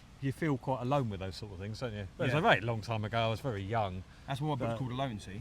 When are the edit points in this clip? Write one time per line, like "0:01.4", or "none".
none